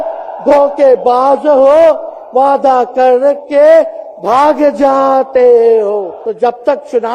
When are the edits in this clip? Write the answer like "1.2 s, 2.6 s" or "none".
6.2 s